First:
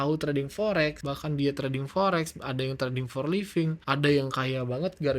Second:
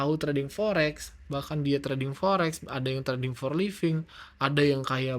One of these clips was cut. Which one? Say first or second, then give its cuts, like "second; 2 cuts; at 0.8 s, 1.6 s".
first; 2 cuts; at 1.1 s, 3.8 s